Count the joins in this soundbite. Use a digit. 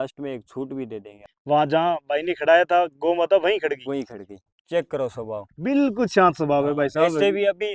2